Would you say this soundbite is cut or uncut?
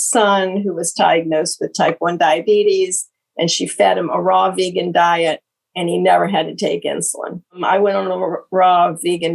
cut